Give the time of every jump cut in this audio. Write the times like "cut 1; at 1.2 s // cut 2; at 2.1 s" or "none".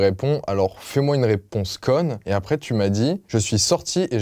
cut 1; at 2.2 s // cut 2; at 3.2 s